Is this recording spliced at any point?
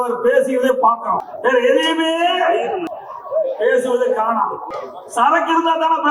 yes; 3 cuts; at 1.3 s, 2.9 s, 4.8 s

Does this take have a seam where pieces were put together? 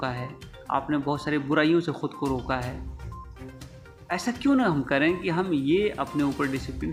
no; 0 cuts

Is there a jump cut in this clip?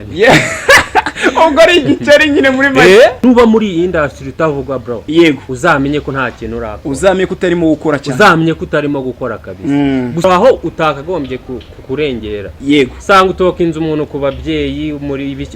yes; 2 cuts; at 3.2 s, 10.2 s

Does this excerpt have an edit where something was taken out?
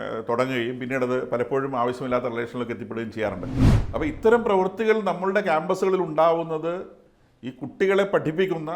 yes; 1 cut; at 3.6 s

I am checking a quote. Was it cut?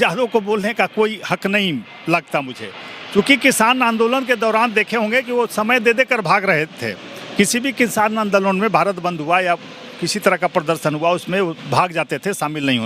no; 0 cuts

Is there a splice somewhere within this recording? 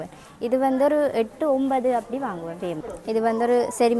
yes; 1 cut; at 2.9 s

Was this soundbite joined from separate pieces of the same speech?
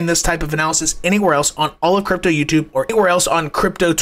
no; 0 cuts

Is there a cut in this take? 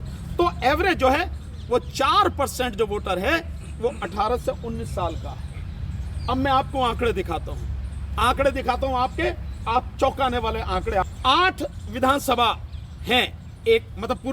yes; 1 cut; at 11.1 s

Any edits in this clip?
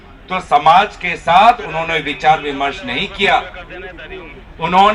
no; 0 cuts

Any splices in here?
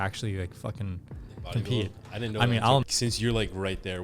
yes; 1 cut; at 2.9 s

